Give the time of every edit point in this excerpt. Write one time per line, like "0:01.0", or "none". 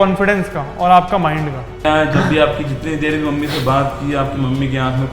0:01.8